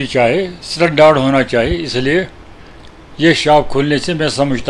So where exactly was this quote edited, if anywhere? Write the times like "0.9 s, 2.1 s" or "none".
none